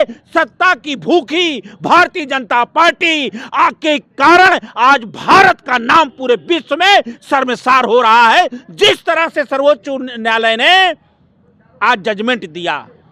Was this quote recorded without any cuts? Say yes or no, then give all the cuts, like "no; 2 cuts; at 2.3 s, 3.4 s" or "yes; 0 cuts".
yes; 0 cuts